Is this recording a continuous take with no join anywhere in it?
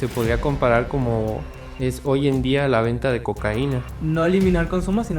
no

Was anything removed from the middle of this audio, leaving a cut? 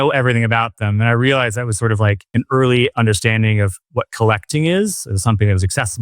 yes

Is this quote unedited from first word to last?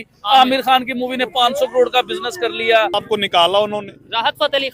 no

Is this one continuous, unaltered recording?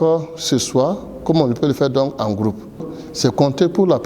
no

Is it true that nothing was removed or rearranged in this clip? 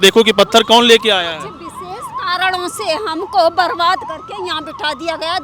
yes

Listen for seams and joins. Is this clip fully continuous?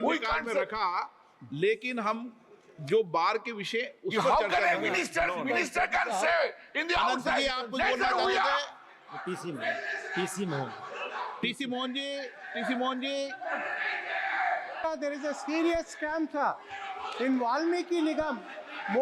no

